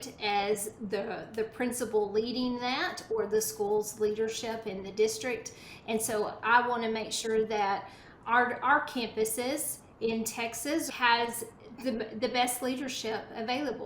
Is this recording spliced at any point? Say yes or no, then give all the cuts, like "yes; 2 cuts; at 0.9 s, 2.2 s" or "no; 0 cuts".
yes; 1 cut; at 10.9 s